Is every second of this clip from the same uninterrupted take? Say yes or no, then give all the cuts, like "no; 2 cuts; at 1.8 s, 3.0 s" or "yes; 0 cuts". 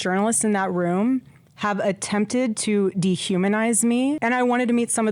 no; 1 cut; at 4.1 s